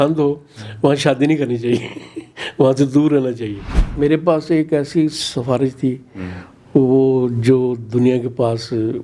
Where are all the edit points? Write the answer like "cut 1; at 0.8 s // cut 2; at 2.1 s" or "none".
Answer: cut 1; at 3.8 s